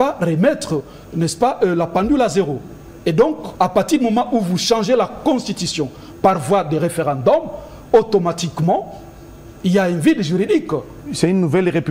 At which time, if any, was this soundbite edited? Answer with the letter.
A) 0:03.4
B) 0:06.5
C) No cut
A